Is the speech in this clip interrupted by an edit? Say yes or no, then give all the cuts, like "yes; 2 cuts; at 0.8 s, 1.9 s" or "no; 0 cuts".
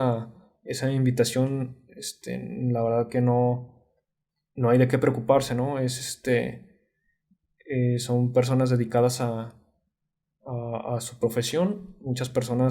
no; 0 cuts